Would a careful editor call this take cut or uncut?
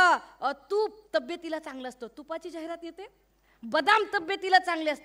uncut